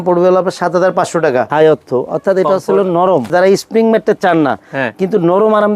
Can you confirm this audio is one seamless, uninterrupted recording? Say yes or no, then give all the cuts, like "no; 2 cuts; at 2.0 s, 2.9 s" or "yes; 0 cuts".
no; 2 cuts; at 1.5 s, 3.3 s